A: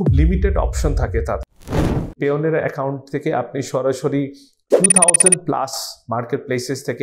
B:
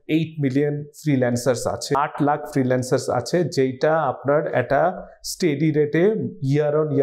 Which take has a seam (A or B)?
A